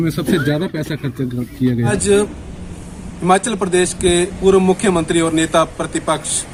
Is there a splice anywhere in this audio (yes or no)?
no